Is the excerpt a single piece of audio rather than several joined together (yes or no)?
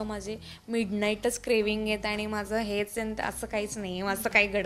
yes